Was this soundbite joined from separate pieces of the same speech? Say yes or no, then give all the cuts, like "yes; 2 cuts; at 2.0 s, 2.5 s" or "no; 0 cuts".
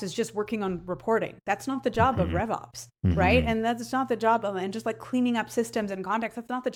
no; 0 cuts